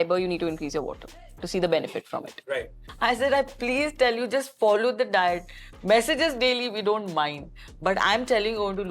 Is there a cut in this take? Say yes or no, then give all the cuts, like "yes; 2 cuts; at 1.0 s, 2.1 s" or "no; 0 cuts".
yes; 1 cut; at 2.8 s